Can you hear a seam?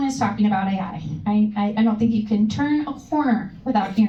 no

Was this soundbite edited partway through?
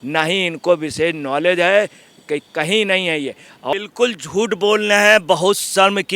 yes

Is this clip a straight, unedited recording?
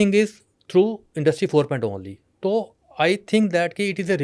yes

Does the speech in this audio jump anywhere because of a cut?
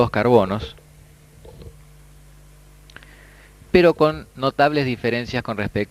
no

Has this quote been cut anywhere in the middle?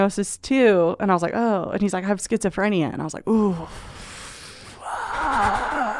no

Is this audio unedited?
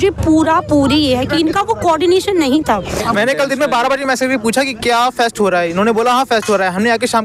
no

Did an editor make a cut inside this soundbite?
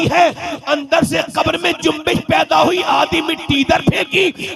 no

